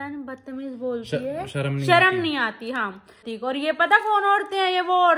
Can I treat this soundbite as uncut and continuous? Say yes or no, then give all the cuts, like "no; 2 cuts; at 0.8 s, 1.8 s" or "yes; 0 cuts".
no; 1 cut; at 3.2 s